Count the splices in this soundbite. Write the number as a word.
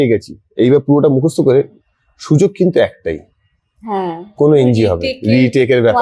zero